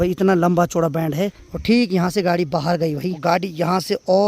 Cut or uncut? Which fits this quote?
cut